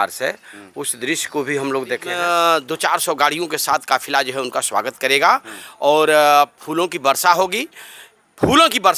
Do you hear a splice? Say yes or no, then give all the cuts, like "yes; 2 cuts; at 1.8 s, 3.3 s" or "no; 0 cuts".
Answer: yes; 1 cut; at 2.1 s